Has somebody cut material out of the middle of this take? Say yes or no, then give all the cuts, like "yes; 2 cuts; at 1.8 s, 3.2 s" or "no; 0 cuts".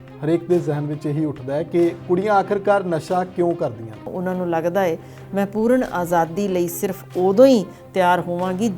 yes; 1 cut; at 4.1 s